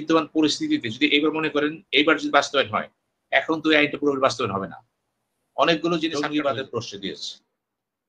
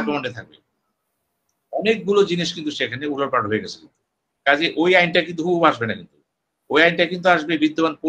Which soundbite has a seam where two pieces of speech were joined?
first; 1 cut; at 6.1 s

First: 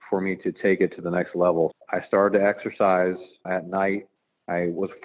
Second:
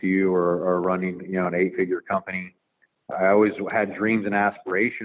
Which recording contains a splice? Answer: first; 2 cuts; at 1.7 s, 3.5 s

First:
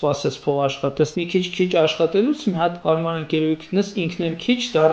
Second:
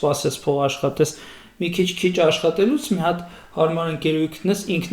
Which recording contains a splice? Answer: first; 2 cuts; at 1.2 s, 2.8 s

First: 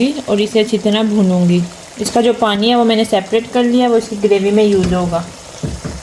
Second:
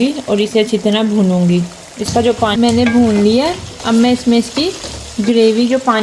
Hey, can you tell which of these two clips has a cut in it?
second; 1 cut; at 2.5 s

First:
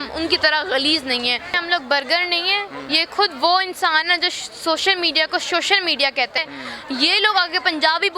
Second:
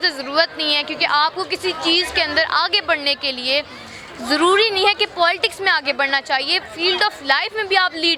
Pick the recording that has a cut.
first; 2 cuts; at 1.6 s, 6.4 s

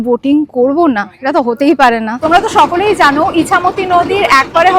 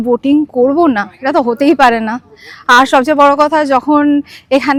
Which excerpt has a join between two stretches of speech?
first; 1 cut; at 2.1 s

